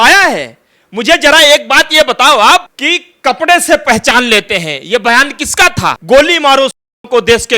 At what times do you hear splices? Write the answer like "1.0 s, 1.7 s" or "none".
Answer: 2.8 s, 6.0 s